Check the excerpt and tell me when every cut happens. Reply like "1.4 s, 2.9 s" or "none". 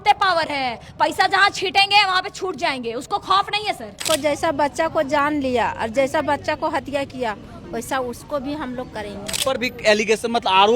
4.0 s, 9.4 s